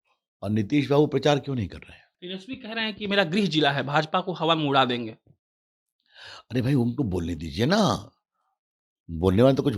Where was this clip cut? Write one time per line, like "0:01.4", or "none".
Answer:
0:02.1